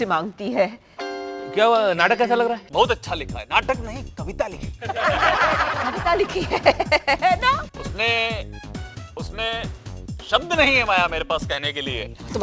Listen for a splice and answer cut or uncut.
cut